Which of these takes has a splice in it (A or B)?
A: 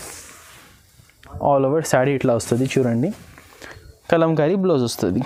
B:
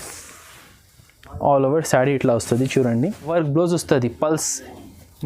B